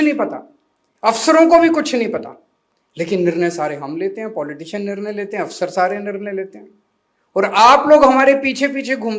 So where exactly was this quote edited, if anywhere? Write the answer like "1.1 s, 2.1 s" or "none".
none